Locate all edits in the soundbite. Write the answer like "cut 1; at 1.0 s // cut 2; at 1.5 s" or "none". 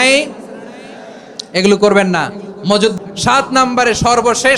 cut 1; at 2.9 s